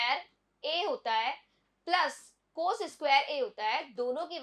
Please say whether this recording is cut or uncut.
uncut